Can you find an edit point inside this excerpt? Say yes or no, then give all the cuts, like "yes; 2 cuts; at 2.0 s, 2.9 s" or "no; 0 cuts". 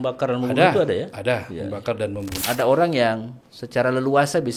yes; 1 cut; at 2.4 s